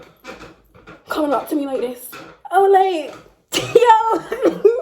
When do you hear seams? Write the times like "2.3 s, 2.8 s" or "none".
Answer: 3.1 s

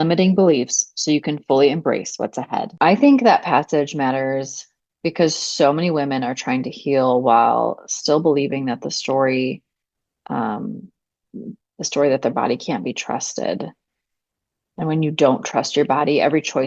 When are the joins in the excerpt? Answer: 2.7 s

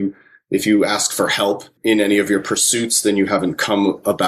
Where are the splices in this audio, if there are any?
1.7 s

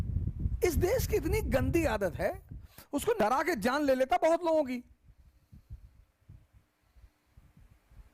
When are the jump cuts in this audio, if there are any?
3.2 s

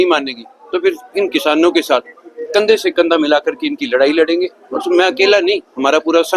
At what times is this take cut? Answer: none

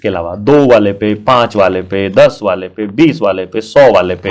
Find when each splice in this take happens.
none

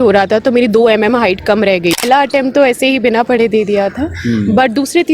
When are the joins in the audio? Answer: 2.0 s

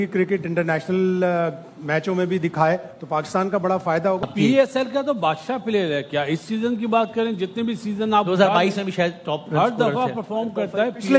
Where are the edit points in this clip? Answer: 4.2 s

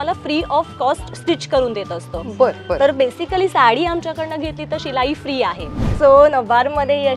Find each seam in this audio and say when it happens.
5.8 s

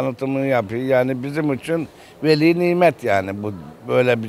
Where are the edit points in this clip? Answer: none

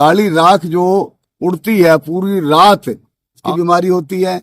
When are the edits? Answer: 3.4 s

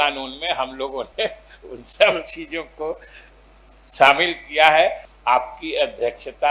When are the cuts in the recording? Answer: 5.0 s

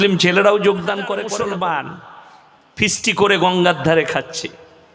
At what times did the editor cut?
1.2 s

